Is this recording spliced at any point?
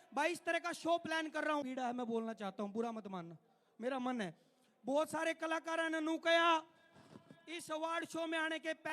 yes; 1 cut; at 1.6 s

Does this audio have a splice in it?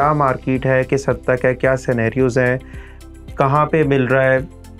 no; 0 cuts

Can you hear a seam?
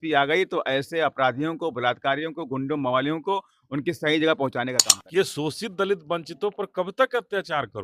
yes; 1 cut; at 4.9 s

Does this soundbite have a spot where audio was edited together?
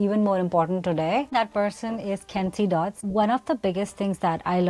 yes; 2 cuts; at 1.3 s, 3.0 s

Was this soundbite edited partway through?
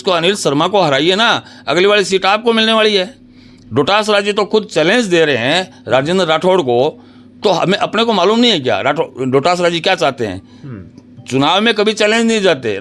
no; 0 cuts

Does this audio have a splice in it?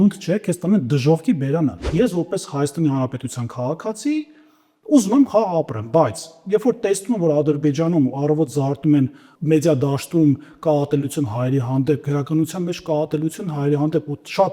yes; 2 cuts; at 1.8 s, 9.3 s

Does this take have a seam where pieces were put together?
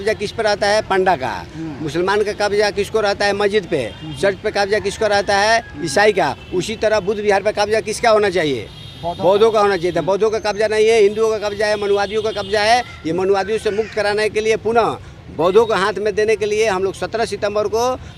no; 0 cuts

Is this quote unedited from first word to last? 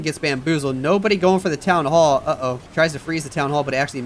no; 1 cut; at 2.6 s

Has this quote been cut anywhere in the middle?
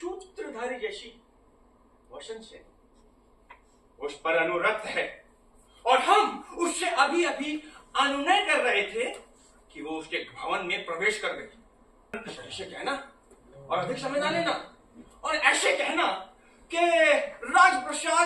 yes; 1 cut; at 12.2 s

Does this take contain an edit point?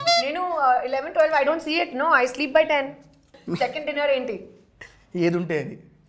yes; 1 cut; at 3.4 s

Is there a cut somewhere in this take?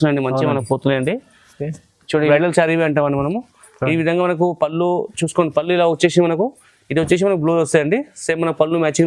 yes; 1 cut; at 2.3 s

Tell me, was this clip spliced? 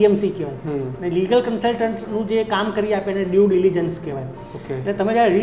no; 0 cuts

